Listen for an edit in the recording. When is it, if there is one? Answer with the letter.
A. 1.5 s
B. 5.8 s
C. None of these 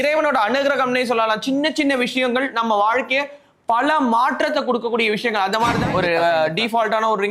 B